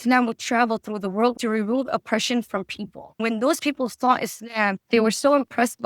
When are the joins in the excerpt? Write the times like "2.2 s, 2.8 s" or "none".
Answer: 1.4 s, 3.2 s, 4.8 s